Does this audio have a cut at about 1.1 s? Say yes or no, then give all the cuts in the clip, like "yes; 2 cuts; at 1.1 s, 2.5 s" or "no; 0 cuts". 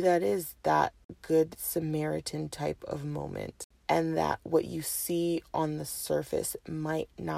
yes; 2 cuts; at 1.1 s, 3.7 s